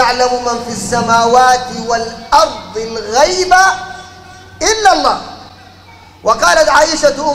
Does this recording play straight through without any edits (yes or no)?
yes